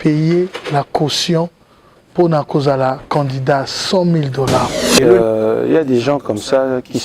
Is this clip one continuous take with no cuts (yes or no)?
no